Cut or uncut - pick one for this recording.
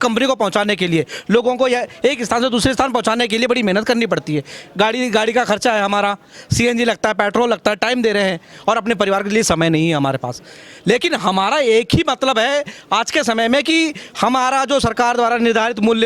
uncut